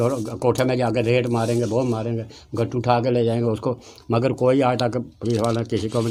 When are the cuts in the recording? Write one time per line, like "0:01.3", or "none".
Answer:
none